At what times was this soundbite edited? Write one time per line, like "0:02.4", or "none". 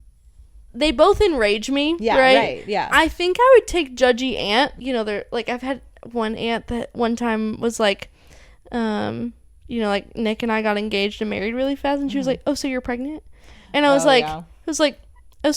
0:04.8

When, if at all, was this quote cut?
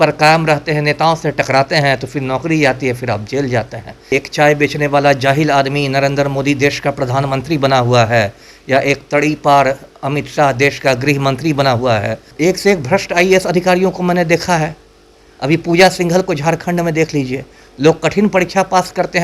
0:04.1
0:12.3

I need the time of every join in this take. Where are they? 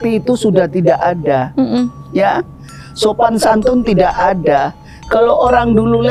none

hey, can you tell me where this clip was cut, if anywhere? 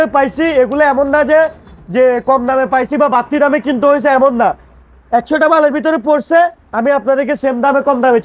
none

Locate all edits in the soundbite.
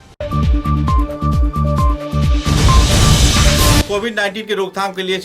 0:03.8

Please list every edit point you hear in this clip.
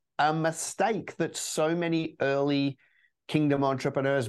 none

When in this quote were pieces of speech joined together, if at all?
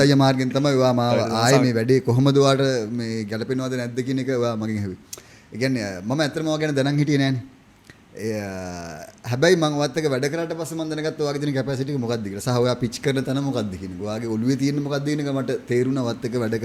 none

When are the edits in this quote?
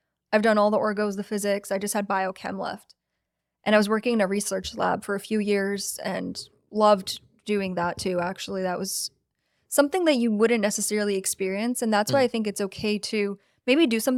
none

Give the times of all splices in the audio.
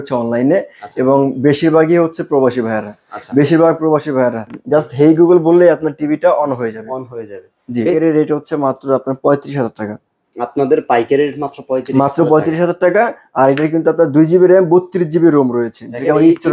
0:04.5
0:07.9

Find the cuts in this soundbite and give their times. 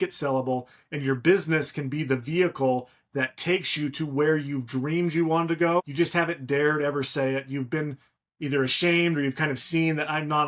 0:05.9

